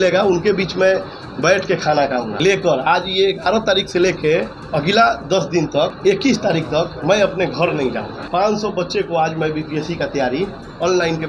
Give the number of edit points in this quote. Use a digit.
3